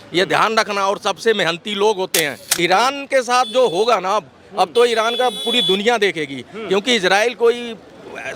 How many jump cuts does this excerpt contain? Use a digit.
1